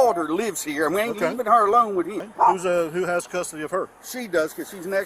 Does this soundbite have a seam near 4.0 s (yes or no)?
no